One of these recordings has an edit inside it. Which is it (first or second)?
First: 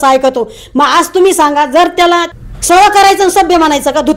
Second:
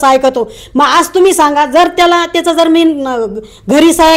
first